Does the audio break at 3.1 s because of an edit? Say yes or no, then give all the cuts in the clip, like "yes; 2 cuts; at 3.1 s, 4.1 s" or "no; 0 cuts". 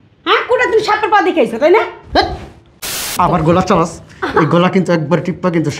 yes; 1 cut; at 3.1 s